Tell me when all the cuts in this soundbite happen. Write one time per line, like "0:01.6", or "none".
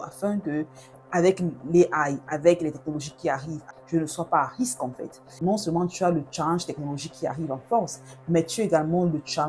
0:03.6
0:05.4